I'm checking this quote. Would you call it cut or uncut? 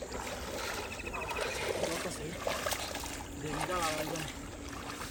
uncut